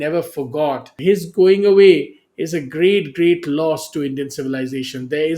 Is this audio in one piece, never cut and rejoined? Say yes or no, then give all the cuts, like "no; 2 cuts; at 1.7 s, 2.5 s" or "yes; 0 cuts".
no; 1 cut; at 1.0 s